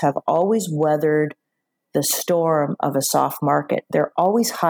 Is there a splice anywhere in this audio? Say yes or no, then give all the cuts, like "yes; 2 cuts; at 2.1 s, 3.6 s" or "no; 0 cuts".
no; 0 cuts